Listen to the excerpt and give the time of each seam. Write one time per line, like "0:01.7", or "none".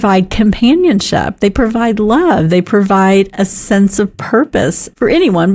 none